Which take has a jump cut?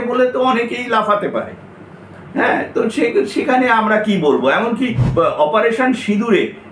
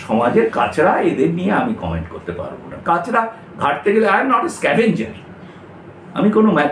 first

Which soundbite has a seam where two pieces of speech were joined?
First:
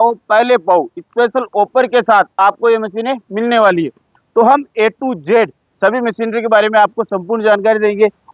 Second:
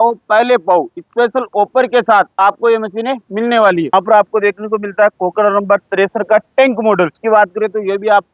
second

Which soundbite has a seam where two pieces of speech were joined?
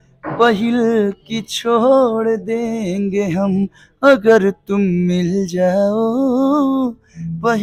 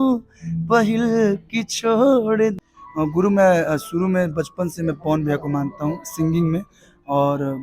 second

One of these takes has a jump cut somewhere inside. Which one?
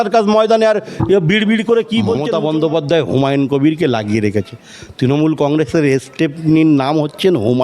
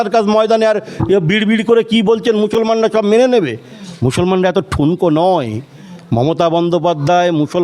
first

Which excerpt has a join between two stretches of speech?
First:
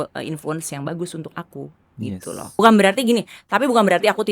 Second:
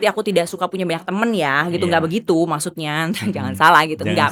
first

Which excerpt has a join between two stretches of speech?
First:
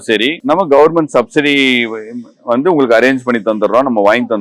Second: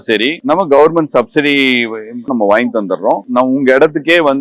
second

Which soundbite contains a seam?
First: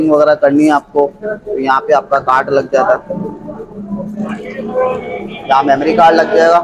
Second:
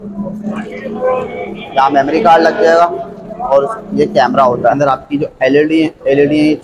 second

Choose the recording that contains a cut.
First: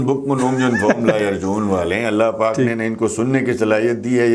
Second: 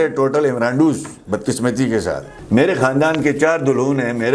second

